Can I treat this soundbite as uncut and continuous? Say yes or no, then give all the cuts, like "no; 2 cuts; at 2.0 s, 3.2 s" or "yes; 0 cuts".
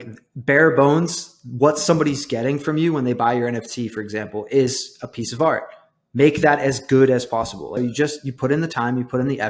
no; 1 cut; at 7.7 s